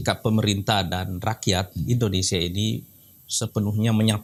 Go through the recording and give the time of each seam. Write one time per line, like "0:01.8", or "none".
none